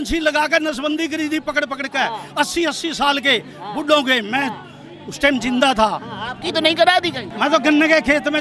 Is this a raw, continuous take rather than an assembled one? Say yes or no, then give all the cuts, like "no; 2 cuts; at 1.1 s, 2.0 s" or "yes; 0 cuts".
yes; 0 cuts